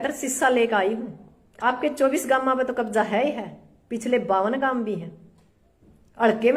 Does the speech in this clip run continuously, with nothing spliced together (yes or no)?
no